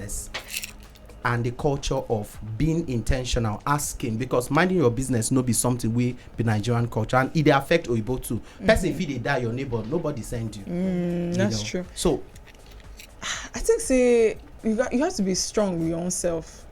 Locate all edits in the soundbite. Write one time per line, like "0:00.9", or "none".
none